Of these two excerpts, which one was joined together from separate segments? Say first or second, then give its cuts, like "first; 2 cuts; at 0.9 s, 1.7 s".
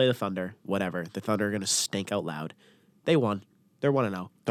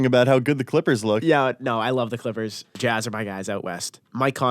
second; 1 cut; at 2.6 s